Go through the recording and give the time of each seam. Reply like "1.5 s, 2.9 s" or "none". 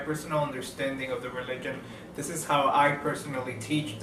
none